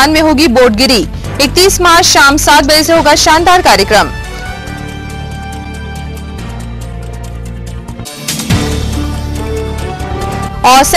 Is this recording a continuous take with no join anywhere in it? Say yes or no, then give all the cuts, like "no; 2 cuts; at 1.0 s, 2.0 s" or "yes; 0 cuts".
yes; 0 cuts